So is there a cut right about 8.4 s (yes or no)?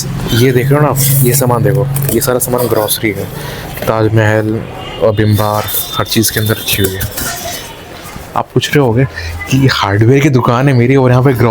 no